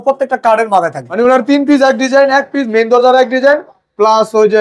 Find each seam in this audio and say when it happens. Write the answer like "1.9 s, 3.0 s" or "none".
1.0 s